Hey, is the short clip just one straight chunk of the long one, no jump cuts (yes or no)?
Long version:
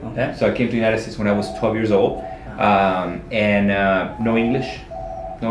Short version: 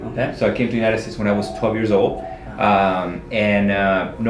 yes